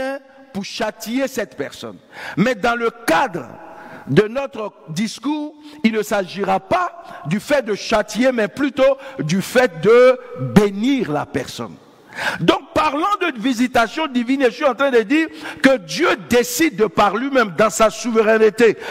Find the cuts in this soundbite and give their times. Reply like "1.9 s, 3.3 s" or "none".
none